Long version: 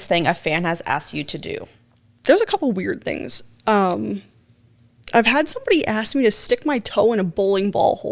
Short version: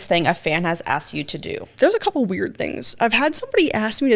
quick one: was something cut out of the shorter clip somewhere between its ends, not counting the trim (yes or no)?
yes